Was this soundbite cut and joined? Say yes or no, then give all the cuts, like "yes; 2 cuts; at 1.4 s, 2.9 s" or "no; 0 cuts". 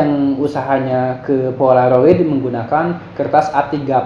no; 0 cuts